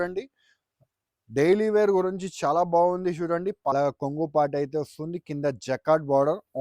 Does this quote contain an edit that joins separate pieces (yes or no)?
yes